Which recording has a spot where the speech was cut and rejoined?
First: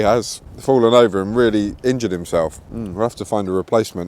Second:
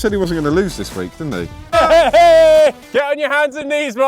second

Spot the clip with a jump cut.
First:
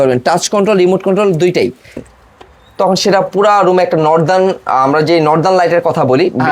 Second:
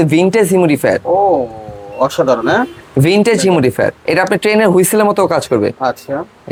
first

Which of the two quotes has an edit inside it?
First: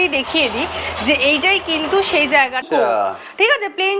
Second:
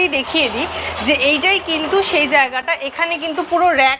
first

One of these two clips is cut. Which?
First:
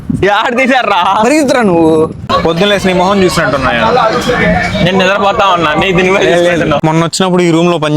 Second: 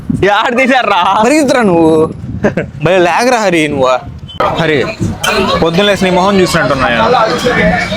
first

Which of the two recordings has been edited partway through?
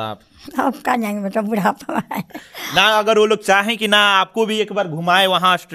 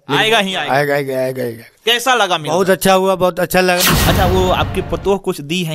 second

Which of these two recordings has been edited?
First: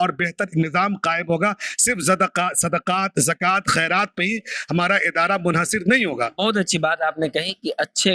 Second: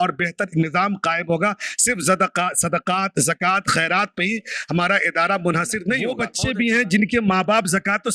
second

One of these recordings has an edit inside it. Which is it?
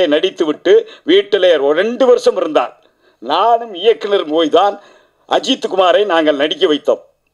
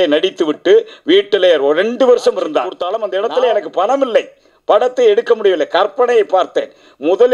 second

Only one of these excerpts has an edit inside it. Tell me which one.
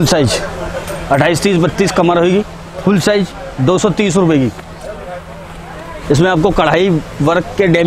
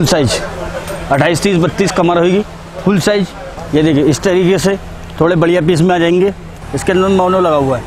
second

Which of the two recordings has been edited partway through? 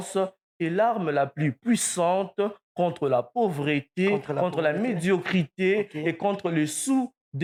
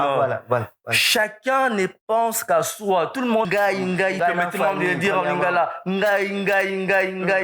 second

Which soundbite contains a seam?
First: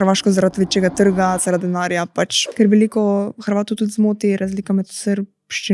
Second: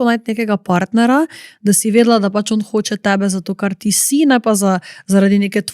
first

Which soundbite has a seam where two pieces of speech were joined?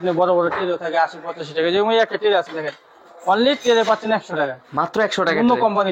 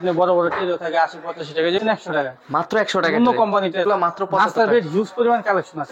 second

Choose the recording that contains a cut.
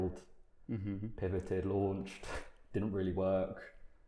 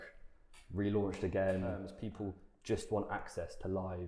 second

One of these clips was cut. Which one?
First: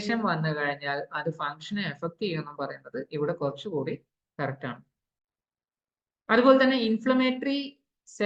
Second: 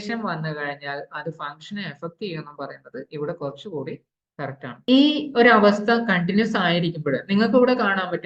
second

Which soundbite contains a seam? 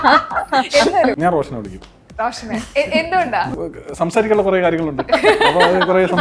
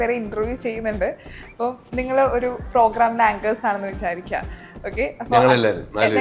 first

